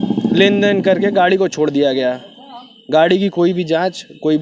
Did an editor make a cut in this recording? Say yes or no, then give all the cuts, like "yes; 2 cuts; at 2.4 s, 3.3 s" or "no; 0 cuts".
no; 0 cuts